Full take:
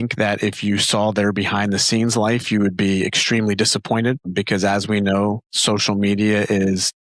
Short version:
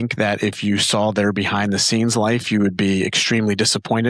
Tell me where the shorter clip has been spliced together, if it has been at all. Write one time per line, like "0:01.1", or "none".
none